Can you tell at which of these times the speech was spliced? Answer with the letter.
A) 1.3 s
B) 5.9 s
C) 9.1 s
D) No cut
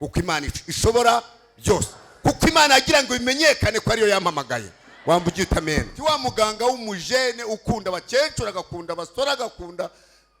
B